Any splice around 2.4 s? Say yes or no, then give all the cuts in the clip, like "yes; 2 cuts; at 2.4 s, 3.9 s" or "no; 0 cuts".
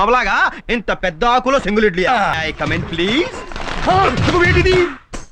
yes; 1 cut; at 2.4 s